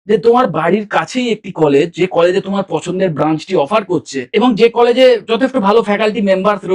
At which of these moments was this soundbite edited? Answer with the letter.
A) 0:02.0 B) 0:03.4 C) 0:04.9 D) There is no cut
D